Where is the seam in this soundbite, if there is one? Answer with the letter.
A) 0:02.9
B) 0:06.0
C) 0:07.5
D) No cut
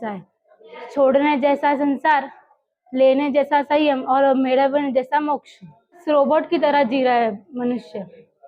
B